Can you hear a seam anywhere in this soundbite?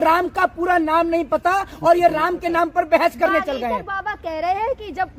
no; 0 cuts

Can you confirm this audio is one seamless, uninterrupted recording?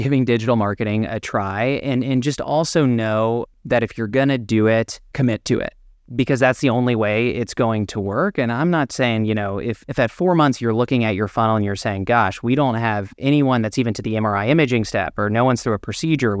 no; 3 cuts; at 5.0 s, 6.0 s, 9.8 s

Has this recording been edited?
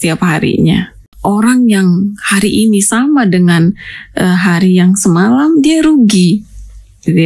yes; 1 cut; at 1.2 s

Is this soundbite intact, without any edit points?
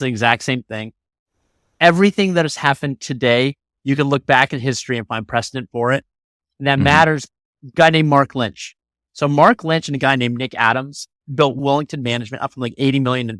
no; 2 cuts; at 7.3 s, 11.6 s

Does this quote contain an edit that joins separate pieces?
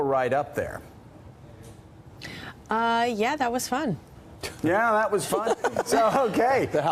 no; 0 cuts

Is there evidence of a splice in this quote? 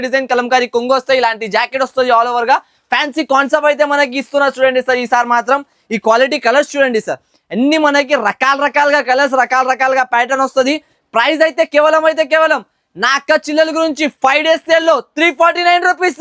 no; 0 cuts

